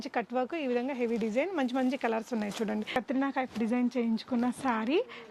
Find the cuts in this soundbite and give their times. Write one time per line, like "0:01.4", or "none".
0:02.9